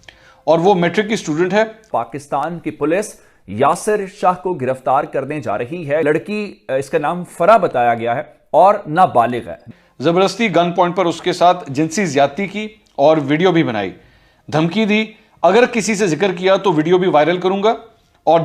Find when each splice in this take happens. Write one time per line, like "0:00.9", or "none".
0:01.9
0:06.0
0:09.6